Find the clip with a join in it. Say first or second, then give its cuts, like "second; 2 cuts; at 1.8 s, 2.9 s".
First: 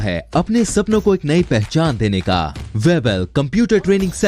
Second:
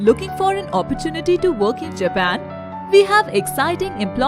first; 1 cut; at 2.6 s